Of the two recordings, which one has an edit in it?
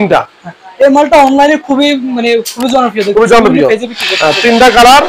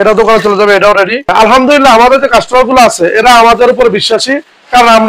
second; 1 cut; at 1.2 s

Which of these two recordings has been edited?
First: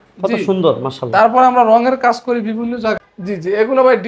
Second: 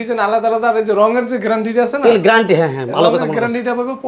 first; 1 cut; at 3.0 s

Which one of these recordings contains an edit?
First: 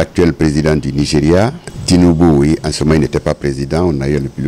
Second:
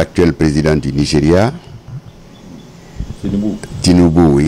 first; 1 cut; at 1.7 s

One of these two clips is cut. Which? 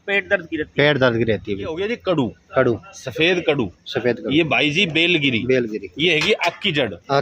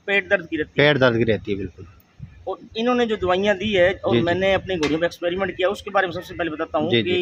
first; 1 cut; at 1.8 s

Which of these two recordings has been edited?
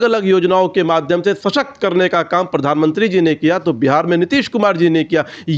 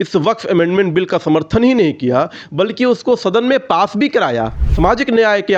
second; 1 cut; at 4.6 s

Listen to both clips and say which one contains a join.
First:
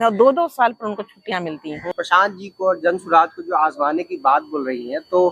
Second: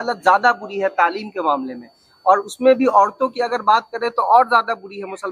first; 1 cut; at 1.9 s

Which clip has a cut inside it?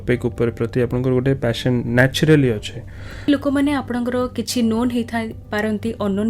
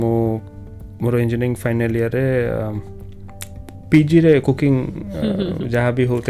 first; 1 cut; at 3.3 s

